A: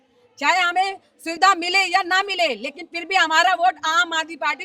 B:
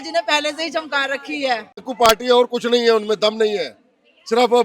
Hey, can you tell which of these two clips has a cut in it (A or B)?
B